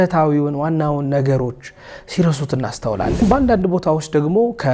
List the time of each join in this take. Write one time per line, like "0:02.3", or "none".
0:03.2